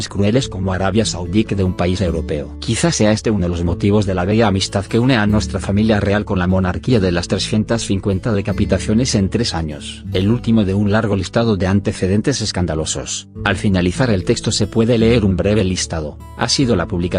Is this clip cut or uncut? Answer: cut